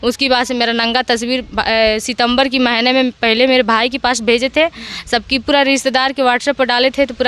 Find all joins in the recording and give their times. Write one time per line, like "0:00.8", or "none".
none